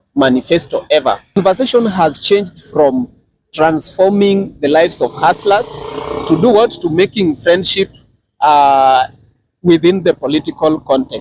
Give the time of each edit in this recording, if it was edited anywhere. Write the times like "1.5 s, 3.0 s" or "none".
1.4 s